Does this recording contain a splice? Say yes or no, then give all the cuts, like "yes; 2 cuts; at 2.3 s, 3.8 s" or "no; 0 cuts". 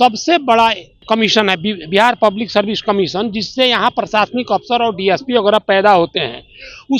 yes; 1 cut; at 1.0 s